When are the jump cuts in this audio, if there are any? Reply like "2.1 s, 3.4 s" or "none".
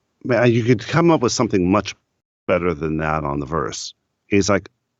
none